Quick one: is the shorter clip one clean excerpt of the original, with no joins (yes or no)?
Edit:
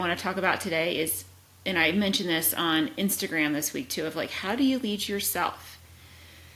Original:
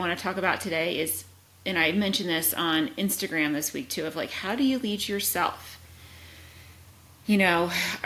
yes